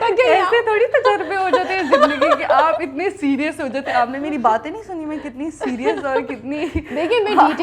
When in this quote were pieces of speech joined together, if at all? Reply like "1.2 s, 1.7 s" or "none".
none

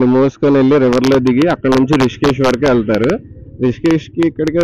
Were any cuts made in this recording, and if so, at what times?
none

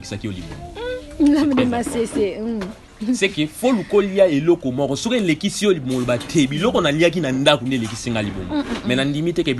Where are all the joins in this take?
none

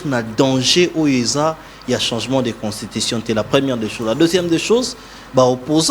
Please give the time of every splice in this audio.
none

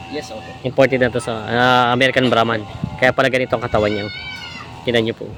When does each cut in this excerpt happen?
none

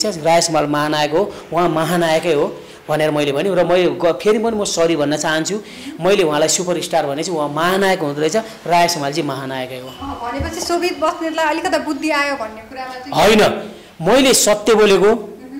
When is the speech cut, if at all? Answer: none

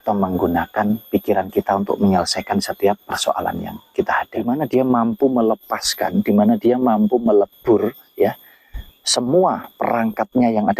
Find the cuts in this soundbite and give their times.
4.3 s

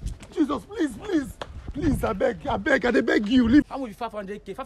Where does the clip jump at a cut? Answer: 3.6 s

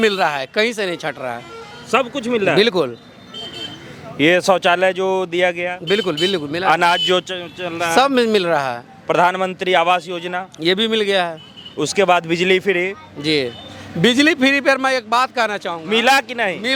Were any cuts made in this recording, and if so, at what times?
none

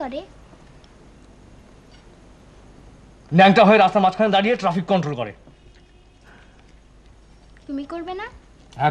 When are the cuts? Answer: none

